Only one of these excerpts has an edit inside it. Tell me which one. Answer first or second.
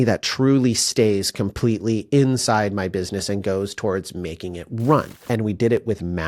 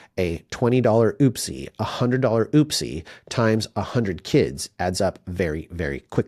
first